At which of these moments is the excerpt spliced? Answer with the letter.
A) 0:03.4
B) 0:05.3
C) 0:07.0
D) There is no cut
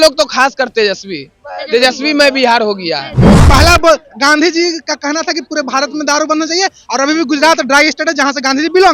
A